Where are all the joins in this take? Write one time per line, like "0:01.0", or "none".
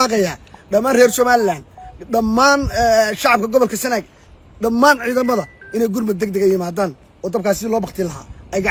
none